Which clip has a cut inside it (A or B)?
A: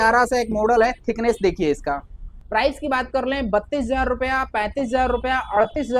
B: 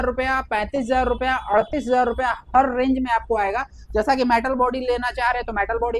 A